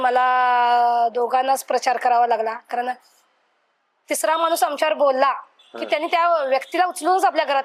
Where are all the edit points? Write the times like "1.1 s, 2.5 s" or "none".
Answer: none